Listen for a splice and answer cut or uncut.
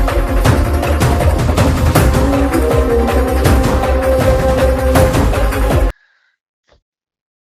uncut